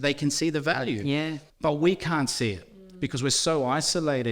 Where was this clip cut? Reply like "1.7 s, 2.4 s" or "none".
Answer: 1.4 s